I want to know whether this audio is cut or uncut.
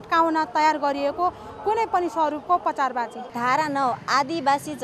cut